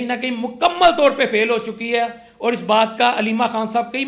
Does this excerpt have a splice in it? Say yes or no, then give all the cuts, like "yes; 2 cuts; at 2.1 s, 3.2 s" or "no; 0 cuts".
no; 0 cuts